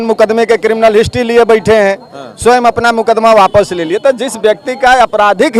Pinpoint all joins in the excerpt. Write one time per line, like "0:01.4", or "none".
none

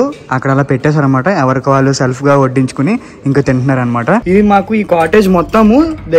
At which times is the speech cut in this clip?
0:04.2

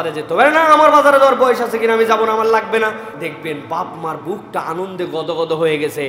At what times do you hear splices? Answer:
0:03.1

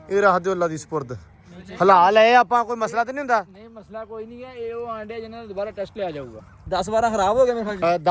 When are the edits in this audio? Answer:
none

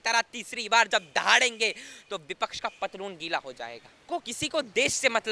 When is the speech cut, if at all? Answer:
0:04.0

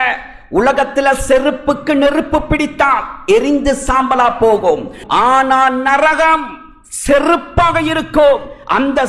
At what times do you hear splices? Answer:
0:05.0

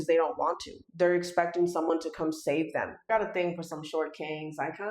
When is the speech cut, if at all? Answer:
0:03.1

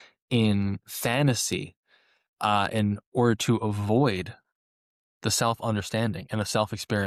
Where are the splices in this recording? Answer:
none

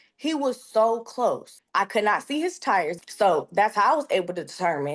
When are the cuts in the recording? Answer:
0:01.5
0:03.0

